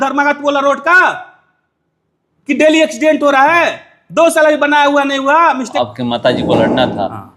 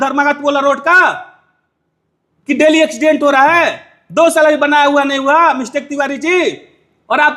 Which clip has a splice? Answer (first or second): first